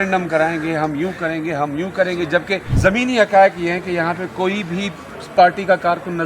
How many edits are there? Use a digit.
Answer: 1